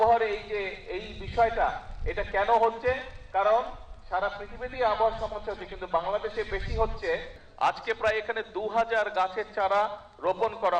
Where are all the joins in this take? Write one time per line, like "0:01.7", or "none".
0:07.4